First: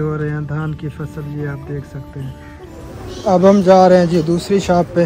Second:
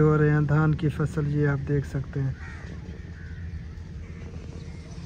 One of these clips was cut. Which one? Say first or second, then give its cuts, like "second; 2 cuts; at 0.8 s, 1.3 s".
first; 1 cut; at 2.8 s